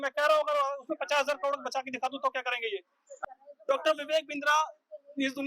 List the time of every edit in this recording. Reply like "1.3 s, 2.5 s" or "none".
3.2 s